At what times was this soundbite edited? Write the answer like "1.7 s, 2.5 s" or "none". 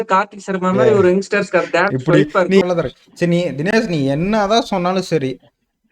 2.6 s

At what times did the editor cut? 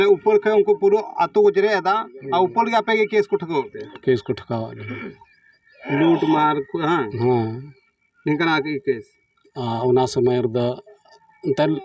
none

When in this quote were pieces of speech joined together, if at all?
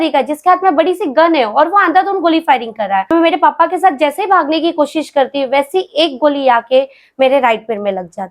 3.1 s

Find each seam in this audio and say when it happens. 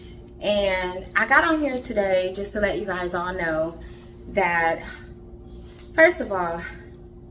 none

